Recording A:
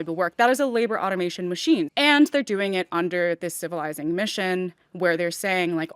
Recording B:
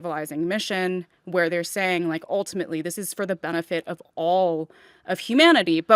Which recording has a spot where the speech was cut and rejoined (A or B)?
A